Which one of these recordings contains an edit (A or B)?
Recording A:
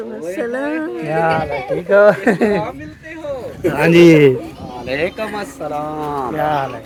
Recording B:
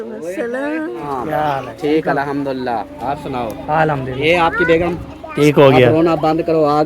B